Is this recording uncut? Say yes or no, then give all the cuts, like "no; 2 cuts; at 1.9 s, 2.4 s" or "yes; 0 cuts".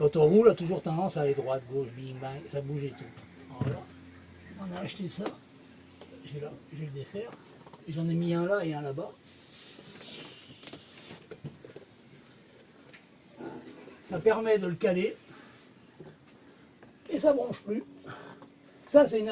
yes; 0 cuts